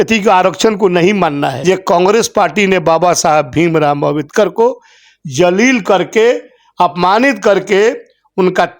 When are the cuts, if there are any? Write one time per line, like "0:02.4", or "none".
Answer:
0:01.5